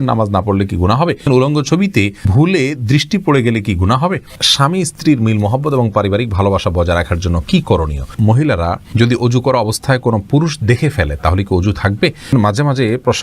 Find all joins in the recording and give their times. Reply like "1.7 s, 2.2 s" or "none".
1.2 s, 2.3 s, 4.4 s, 8.1 s, 12.3 s